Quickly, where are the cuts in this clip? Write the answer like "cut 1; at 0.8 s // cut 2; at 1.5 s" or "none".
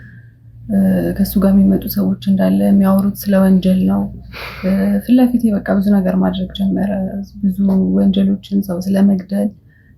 none